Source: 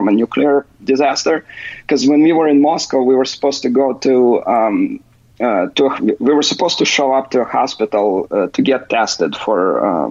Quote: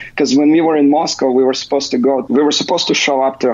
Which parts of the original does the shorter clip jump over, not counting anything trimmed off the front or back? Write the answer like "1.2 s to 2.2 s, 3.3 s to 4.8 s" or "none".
4.0 s to 6.2 s